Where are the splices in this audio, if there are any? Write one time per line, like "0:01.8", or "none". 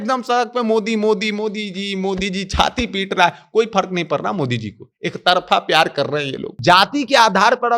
0:06.5